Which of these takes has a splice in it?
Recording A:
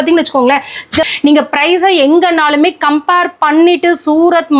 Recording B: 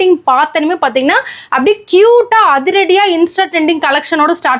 A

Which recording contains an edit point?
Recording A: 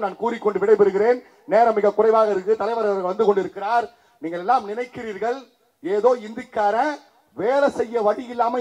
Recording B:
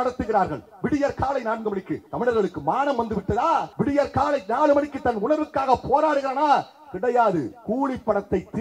B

